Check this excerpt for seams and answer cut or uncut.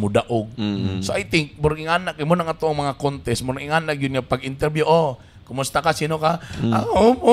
uncut